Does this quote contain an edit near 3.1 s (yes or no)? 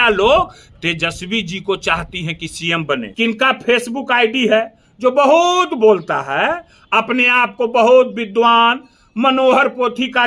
yes